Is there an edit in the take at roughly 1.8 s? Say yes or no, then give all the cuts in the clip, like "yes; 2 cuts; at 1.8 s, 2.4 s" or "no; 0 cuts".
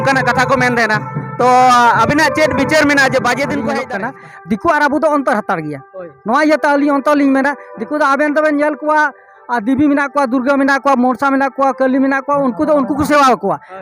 no; 1 cut; at 3.8 s